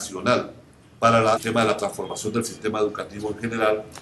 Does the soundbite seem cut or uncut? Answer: uncut